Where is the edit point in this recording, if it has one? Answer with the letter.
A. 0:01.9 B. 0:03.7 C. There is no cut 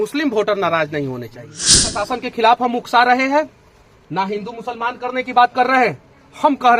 A